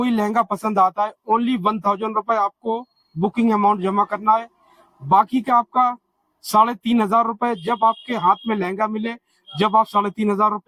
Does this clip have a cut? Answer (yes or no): no